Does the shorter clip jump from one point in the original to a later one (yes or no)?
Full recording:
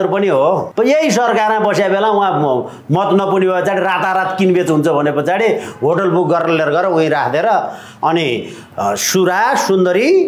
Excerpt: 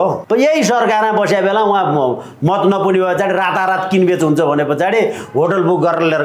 no